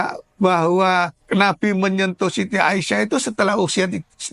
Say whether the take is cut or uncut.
cut